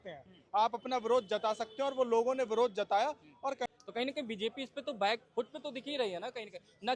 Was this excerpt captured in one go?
no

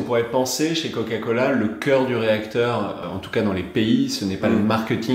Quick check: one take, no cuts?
no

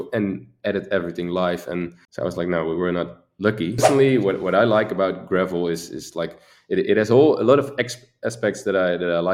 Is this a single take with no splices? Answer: no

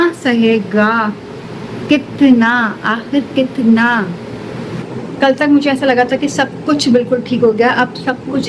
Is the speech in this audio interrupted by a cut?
no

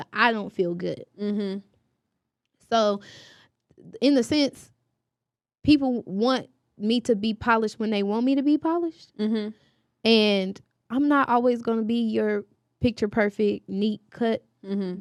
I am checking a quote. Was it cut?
no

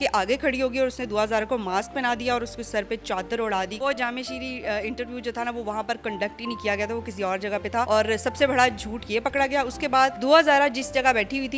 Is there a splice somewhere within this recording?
yes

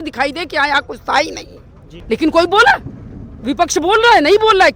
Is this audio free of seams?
no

